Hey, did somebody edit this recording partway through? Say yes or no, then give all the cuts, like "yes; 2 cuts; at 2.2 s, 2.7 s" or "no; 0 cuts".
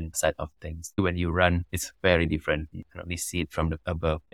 yes; 2 cuts; at 1.0 s, 2.7 s